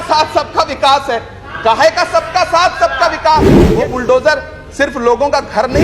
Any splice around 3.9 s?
yes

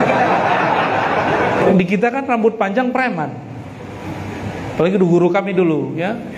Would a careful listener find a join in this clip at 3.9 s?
no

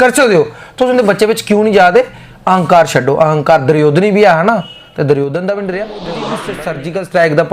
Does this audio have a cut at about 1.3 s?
no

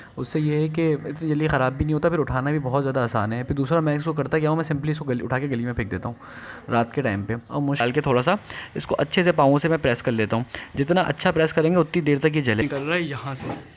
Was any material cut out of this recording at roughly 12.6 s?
yes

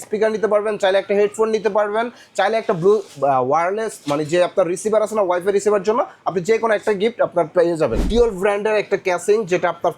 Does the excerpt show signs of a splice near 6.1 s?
no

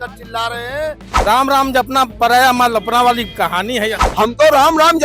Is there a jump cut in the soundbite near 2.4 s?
no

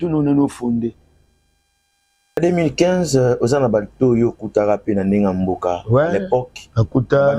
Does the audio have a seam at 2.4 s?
yes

